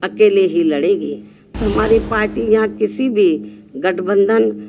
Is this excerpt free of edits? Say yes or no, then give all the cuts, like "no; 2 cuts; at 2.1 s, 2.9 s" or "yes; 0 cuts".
no; 1 cut; at 1.5 s